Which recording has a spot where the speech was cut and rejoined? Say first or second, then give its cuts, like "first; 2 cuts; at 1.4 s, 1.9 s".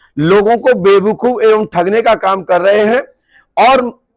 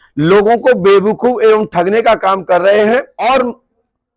second; 1 cut; at 3.1 s